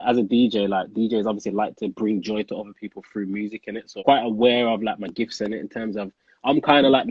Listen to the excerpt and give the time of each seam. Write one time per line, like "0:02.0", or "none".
0:03.9